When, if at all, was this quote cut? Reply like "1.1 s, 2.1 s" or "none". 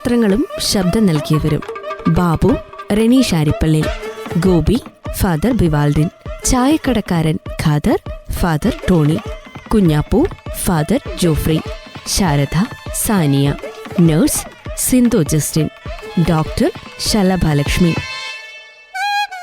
17.9 s